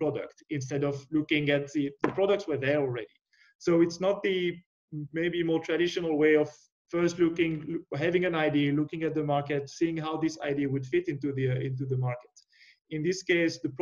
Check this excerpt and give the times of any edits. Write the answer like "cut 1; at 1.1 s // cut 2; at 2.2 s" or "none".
none